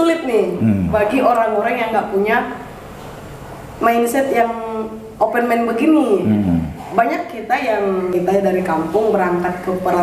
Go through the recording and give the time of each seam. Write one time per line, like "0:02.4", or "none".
0:08.1